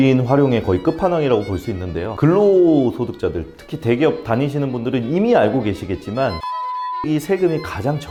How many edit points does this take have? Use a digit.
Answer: 0